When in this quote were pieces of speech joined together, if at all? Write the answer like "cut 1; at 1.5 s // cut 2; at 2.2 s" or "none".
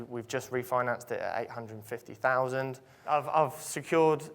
cut 1; at 2.9 s